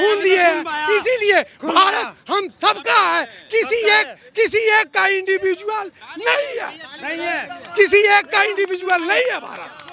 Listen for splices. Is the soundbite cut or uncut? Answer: uncut